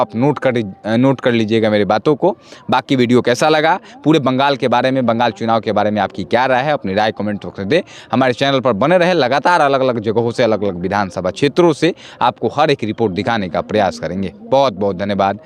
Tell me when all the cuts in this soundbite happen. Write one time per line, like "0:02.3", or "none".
none